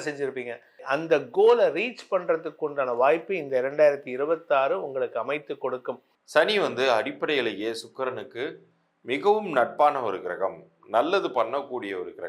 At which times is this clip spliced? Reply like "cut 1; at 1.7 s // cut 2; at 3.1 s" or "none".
cut 1; at 6.1 s